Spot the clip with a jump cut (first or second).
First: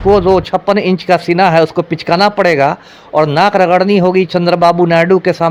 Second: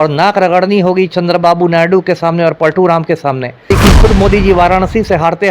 second